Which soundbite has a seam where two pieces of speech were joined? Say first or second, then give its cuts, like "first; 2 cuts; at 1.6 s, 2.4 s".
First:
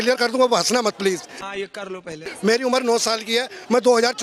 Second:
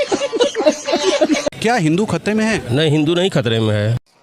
second; 1 cut; at 1.6 s